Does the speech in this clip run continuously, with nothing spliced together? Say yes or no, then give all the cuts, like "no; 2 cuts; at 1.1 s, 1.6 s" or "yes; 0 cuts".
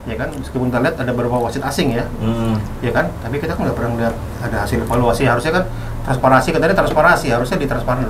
yes; 0 cuts